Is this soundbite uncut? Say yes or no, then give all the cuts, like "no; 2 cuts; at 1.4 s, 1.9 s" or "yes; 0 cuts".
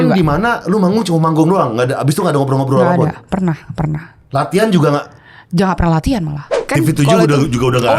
no; 1 cut; at 6.5 s